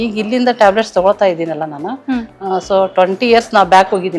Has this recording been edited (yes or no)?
no